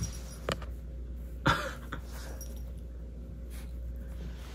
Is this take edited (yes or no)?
no